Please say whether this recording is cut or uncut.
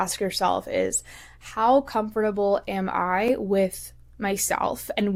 uncut